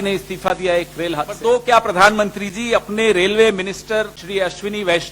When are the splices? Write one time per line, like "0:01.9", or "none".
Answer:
0:01.4
0:04.2